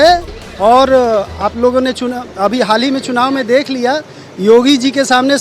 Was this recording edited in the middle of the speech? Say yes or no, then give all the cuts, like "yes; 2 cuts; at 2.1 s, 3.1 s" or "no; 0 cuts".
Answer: no; 0 cuts